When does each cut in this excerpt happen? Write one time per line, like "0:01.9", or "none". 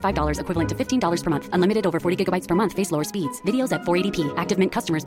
none